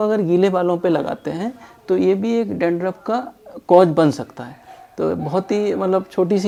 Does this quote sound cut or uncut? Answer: uncut